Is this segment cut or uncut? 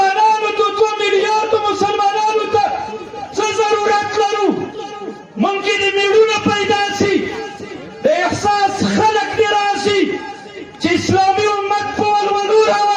uncut